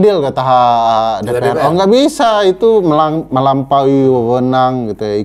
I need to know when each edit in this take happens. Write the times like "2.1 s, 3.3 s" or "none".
none